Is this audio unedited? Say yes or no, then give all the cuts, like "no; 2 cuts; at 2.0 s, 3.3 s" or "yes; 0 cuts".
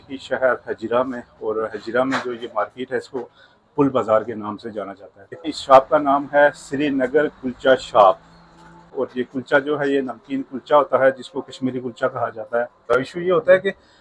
no; 3 cuts; at 5.5 s, 9.0 s, 12.8 s